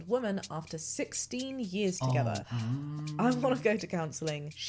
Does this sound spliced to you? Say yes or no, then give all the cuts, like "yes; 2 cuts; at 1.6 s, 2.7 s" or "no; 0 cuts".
yes; 1 cut; at 2.5 s